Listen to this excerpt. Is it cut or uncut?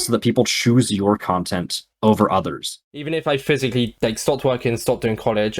cut